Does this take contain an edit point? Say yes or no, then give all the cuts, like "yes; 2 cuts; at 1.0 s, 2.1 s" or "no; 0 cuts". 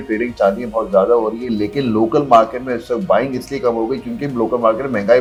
no; 0 cuts